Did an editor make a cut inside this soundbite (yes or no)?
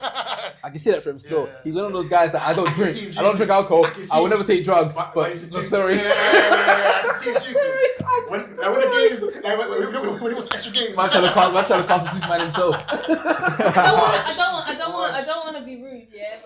no